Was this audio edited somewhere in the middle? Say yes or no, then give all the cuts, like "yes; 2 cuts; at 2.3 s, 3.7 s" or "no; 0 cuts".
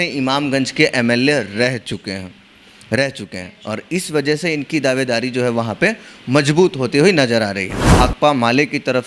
yes; 1 cut; at 7.9 s